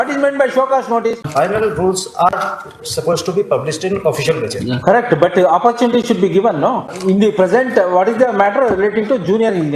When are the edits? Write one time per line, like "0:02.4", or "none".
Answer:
0:01.3
0:06.9